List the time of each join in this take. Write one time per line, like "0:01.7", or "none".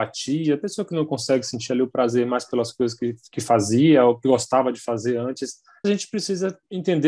0:05.8